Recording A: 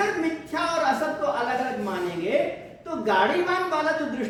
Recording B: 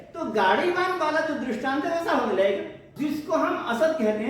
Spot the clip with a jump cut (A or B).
B